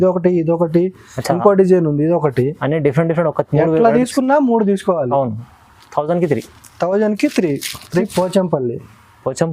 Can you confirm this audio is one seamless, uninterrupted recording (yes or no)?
no